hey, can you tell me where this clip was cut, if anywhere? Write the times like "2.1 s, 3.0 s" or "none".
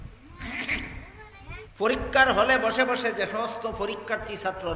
1.7 s